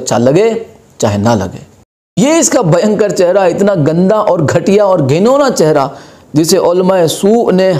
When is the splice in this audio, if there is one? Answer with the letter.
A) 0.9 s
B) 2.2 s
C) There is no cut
B